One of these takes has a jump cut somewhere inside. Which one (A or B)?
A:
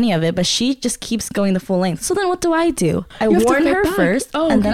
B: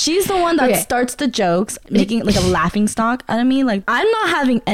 B